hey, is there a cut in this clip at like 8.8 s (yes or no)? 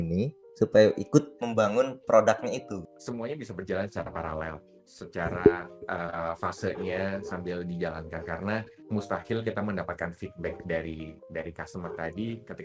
yes